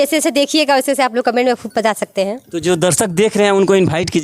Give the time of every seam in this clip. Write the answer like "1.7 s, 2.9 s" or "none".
none